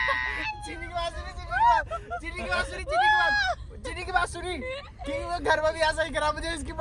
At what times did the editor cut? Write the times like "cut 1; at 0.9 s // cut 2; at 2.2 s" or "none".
none